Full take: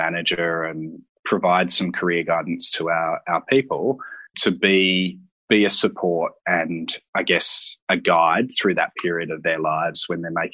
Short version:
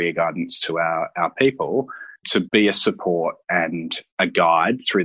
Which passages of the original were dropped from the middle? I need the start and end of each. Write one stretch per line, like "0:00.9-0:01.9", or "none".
0:04.6-0:05.4
0:07.0-0:07.7